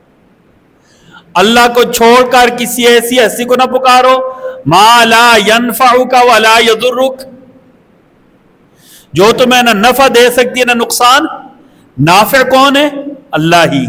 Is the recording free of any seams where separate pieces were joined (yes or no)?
yes